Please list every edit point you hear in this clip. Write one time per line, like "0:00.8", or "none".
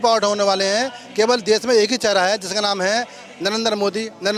none

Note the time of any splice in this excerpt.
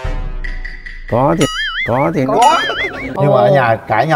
0:03.1

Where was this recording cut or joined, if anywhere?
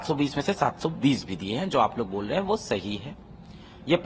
none

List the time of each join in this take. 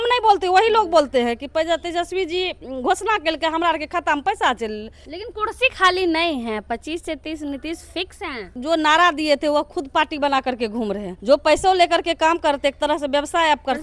0:05.0
0:08.5
0:11.1

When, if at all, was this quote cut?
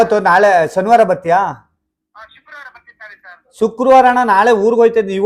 none

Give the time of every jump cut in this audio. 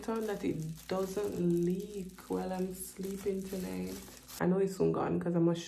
0:04.3

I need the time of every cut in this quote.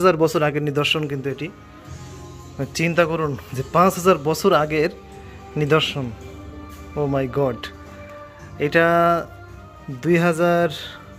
none

